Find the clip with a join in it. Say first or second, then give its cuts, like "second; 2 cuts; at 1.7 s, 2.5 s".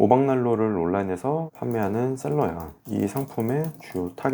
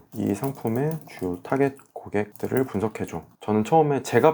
second; 1 cut; at 3.3 s